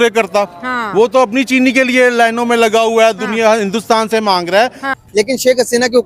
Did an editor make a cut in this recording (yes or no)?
yes